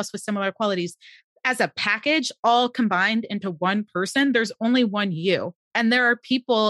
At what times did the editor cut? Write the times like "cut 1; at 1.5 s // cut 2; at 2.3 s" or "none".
cut 1; at 5.6 s